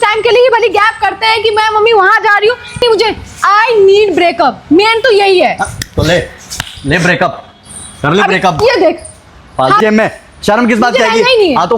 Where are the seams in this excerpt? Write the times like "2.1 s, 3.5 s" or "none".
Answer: 2.8 s, 9.8 s